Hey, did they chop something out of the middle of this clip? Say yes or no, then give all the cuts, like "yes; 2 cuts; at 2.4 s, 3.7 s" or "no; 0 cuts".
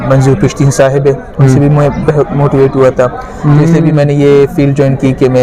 no; 0 cuts